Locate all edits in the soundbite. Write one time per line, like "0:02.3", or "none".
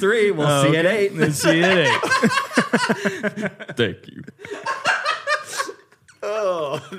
0:04.1